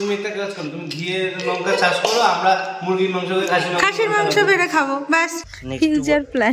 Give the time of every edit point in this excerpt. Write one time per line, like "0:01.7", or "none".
0:05.4